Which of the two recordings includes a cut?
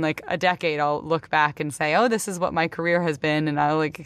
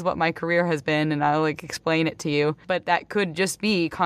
second; 1 cut; at 2.6 s

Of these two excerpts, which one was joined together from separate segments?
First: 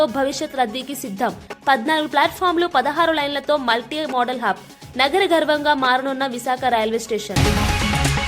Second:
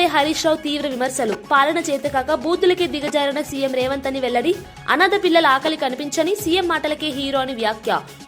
first; 1 cut; at 7.4 s

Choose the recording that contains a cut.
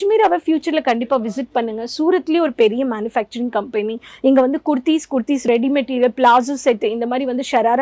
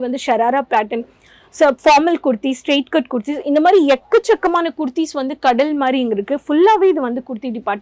first; 1 cut; at 5.4 s

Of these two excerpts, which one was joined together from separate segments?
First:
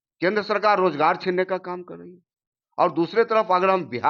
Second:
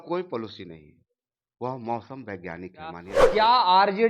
second; 1 cut; at 3.1 s

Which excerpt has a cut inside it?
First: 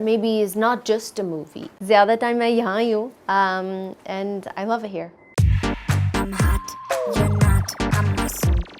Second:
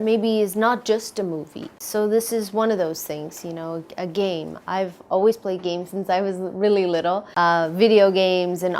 first; 2 cuts; at 1.7 s, 5.3 s

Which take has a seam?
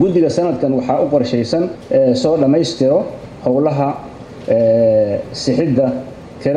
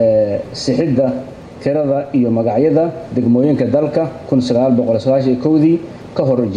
first; 1 cut; at 1.8 s

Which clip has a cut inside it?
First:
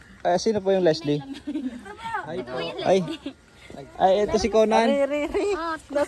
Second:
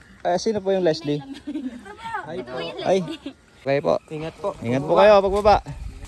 second; 1 cut; at 3.6 s

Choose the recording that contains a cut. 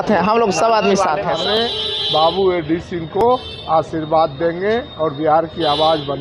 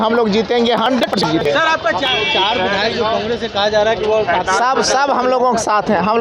first; 1 cut; at 1.3 s

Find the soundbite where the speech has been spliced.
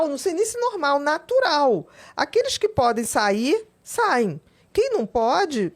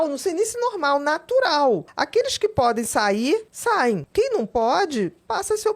second; 2 cuts; at 1.9 s, 3.7 s

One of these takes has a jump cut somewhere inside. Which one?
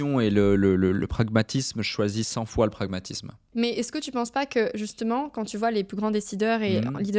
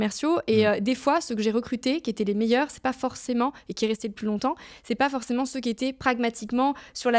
first; 1 cut; at 3.5 s

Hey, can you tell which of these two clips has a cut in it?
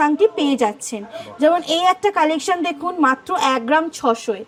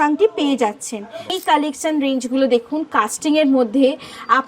second; 1 cut; at 1.3 s

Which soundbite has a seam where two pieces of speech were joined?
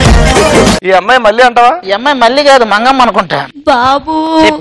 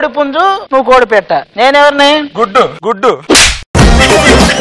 first; 3 cuts; at 0.8 s, 1.9 s, 3.4 s

